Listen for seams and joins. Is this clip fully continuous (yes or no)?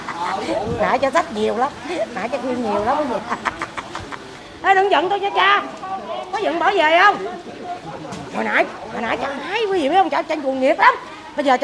yes